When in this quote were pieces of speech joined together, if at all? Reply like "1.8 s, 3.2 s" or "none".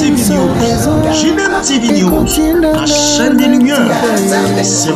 none